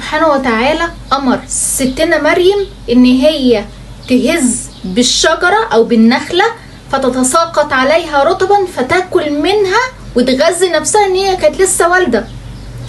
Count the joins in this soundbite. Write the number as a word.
zero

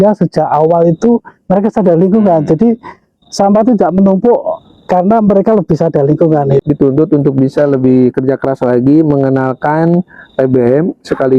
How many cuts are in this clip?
one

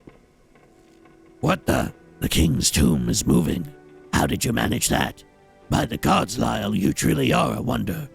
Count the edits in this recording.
two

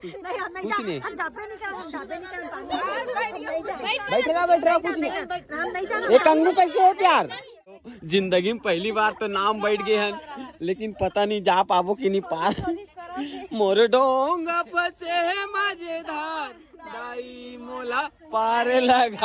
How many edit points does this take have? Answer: one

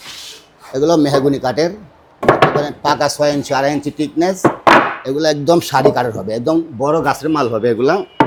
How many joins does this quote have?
zero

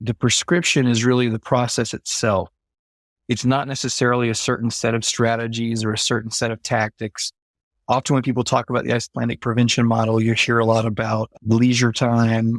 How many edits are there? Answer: zero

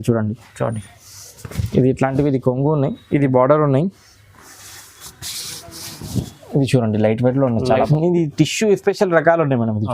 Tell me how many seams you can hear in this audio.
one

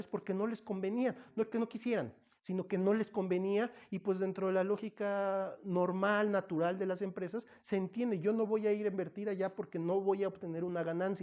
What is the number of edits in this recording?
zero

